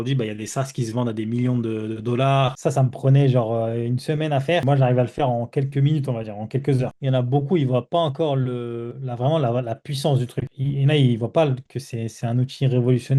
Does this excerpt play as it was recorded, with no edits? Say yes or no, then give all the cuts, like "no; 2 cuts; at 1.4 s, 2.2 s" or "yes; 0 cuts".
no; 3 cuts; at 2.6 s, 4.6 s, 7.0 s